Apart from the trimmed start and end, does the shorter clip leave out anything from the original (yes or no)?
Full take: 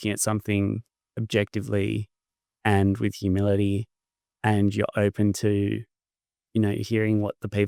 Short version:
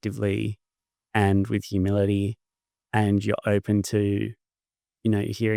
no